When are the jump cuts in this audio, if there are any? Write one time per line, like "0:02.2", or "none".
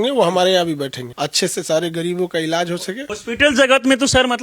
0:01.0
0:03.1